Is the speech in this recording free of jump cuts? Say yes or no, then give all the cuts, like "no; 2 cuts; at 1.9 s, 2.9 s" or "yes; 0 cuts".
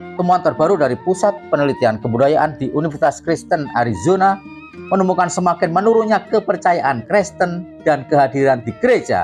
yes; 0 cuts